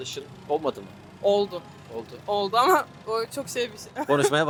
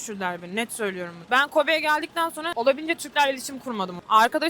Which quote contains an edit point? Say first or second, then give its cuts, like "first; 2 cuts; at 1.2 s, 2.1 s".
second; 1 cut; at 2.5 s